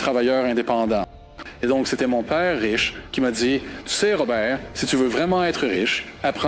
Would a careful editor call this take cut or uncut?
cut